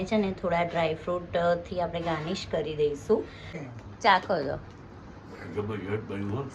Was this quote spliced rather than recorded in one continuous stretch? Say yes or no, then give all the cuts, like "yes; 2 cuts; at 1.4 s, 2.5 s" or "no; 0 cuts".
yes; 1 cut; at 3.6 s